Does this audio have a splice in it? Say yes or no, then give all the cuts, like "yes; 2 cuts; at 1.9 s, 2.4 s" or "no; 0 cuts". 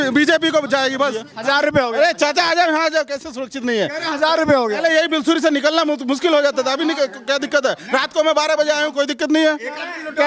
yes; 1 cut; at 1.3 s